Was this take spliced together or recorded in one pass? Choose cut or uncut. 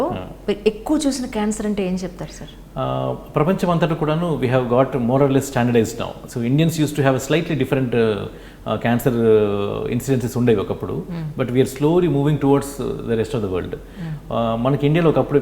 uncut